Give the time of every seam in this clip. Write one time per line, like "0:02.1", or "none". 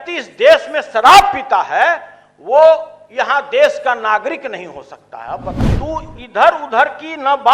0:05.7